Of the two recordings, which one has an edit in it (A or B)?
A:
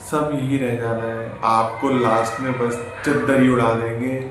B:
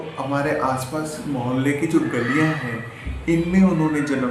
A